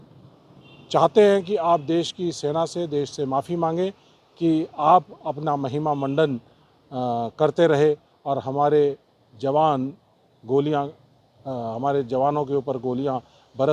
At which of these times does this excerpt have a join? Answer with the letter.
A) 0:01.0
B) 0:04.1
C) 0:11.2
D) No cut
D